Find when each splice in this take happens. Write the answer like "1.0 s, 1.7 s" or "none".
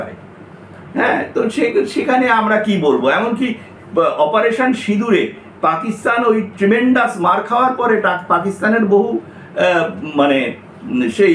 none